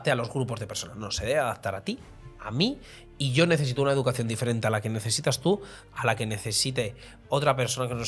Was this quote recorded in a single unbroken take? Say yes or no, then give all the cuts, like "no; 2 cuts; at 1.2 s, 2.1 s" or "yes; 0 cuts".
yes; 0 cuts